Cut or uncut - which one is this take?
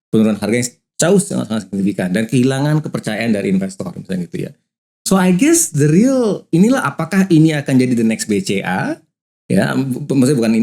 uncut